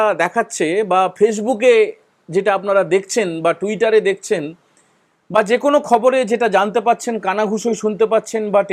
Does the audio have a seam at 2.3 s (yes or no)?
no